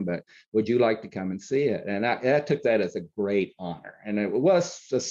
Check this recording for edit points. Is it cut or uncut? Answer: uncut